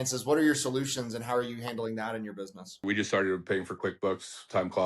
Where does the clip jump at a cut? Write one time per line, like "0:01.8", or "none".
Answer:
0:02.8